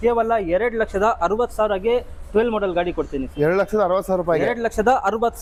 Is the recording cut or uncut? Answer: uncut